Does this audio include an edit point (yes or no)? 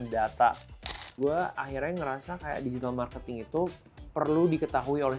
yes